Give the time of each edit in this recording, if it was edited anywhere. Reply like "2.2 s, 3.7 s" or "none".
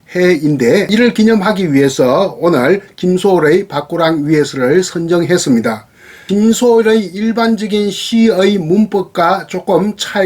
0.9 s, 6.1 s